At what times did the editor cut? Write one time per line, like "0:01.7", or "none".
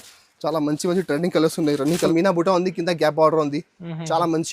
0:02.0